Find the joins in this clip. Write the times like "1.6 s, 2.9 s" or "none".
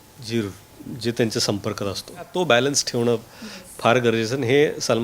2.3 s